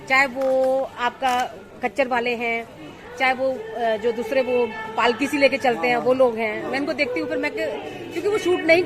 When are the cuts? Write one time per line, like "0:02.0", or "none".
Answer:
none